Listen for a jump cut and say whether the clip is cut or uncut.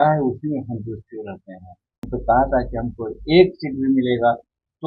cut